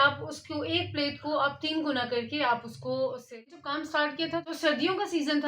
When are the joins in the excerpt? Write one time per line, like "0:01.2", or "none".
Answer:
0:03.5